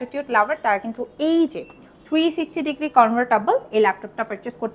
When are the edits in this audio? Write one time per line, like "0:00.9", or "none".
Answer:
none